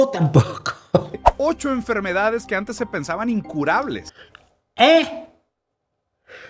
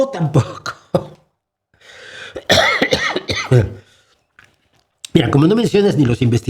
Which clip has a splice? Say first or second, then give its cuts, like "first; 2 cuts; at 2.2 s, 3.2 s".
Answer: first; 1 cut; at 1.2 s